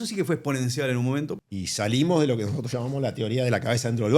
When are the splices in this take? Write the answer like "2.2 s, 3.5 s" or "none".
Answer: 1.4 s